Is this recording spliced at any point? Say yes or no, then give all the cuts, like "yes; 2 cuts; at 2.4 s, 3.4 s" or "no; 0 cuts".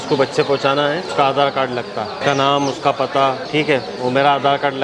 yes; 3 cuts; at 1.1 s, 2.2 s, 3.4 s